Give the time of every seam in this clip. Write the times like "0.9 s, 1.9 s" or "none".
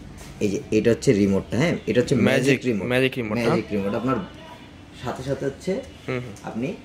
none